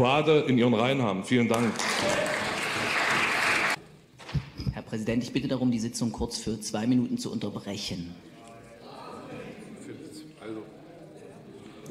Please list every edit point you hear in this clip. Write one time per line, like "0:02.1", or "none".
0:03.8